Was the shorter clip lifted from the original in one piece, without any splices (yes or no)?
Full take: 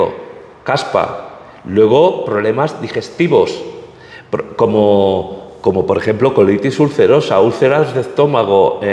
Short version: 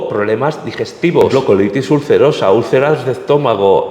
no